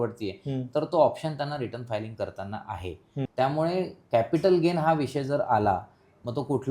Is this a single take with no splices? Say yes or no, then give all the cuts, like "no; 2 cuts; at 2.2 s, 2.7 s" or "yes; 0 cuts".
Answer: no; 1 cut; at 3.3 s